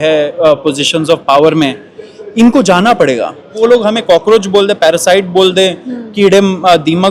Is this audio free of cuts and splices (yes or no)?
no